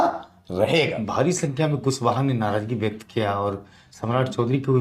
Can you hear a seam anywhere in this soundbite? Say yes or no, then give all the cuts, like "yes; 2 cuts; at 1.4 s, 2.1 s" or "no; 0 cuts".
yes; 1 cut; at 1.0 s